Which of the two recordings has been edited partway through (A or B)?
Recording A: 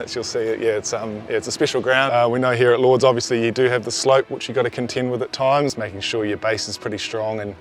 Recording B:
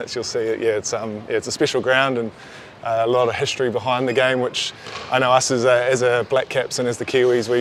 A